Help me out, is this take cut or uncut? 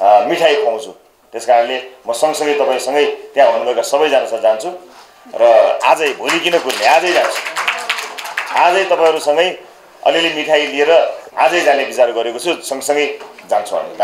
cut